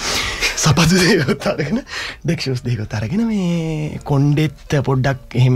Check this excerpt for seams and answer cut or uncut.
uncut